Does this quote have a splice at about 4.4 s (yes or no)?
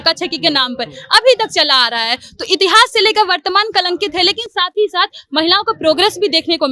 no